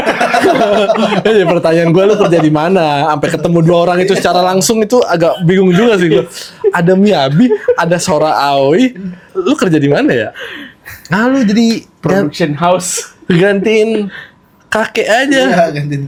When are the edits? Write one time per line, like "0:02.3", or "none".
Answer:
none